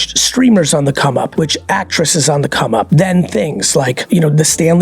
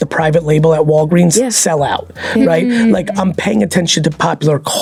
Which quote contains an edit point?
first; 3 cuts; at 1.3 s, 2.9 s, 4.0 s

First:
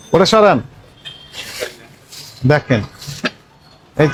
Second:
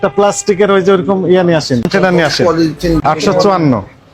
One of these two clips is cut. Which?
second; 2 cuts; at 1.9 s, 3.0 s

